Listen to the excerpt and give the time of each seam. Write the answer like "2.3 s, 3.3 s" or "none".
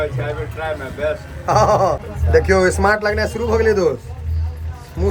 2.1 s